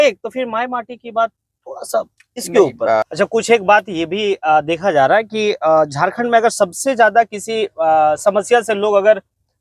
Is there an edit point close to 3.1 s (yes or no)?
yes